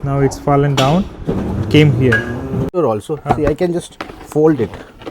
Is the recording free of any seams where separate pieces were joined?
no; 1 cut; at 2.7 s

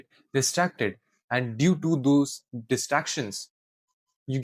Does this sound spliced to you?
no; 0 cuts

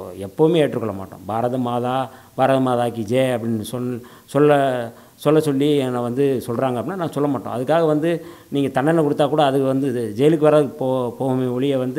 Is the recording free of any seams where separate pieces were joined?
yes; 0 cuts

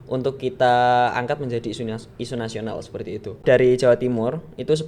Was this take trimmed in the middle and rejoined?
yes; 1 cut; at 3.4 s

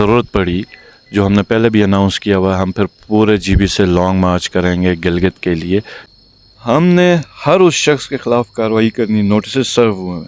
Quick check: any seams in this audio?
yes; 1 cut; at 6.0 s

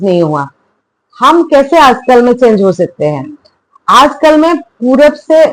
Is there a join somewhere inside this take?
no; 0 cuts

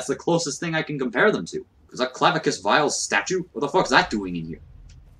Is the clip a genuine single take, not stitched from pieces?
no; 1 cut; at 1.8 s

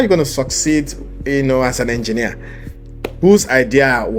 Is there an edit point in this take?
no; 0 cuts

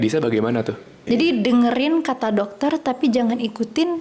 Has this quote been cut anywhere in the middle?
yes; 1 cut; at 0.9 s

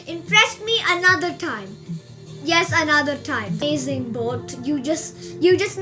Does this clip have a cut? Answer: yes; 1 cut; at 3.6 s

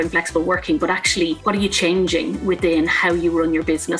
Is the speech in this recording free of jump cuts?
no; 1 cut; at 1.5 s

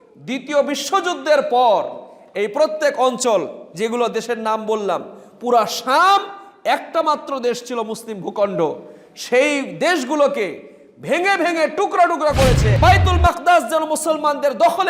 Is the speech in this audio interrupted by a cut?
yes; 1 cut; at 12.7 s

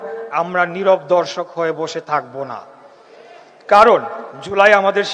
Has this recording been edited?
no; 0 cuts

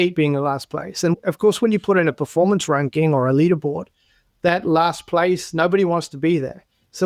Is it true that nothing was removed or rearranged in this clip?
no; 1 cut; at 1.1 s

